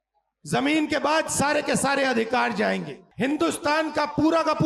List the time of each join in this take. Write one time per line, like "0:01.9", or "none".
0:03.0